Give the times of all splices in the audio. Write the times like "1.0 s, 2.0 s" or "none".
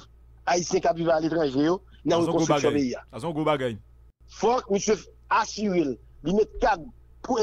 3.7 s